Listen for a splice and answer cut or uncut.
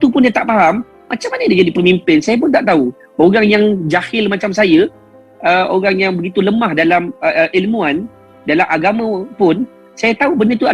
uncut